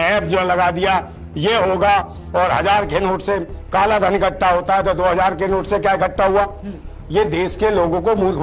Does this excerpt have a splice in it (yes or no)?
no